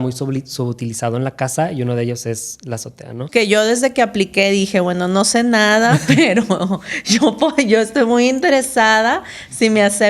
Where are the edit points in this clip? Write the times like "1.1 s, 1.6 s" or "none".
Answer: 3.2 s